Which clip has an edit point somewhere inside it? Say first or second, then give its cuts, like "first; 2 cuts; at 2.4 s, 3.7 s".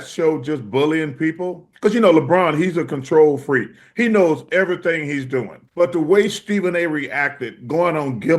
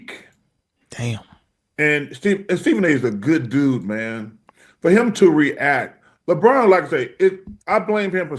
first; 2 cuts; at 1.6 s, 5.6 s